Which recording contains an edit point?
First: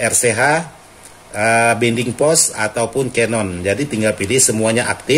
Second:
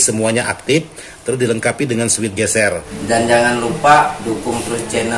second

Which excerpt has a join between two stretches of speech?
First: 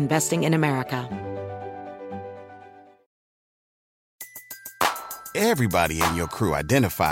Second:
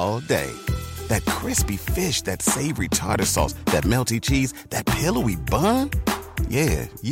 first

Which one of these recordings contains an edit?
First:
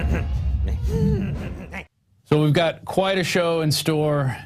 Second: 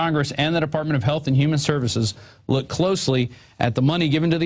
first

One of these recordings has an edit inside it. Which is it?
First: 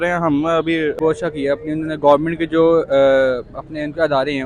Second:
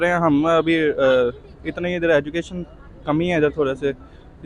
first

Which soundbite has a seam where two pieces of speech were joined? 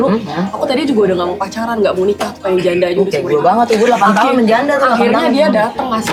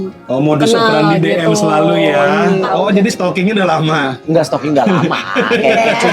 second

